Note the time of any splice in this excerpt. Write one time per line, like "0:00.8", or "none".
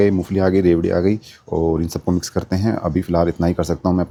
none